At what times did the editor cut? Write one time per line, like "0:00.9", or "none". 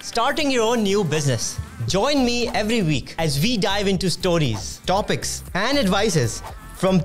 none